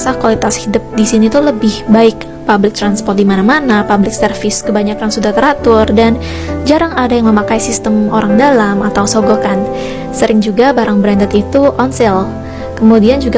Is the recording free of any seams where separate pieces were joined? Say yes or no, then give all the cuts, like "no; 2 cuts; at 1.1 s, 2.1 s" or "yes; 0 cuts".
yes; 0 cuts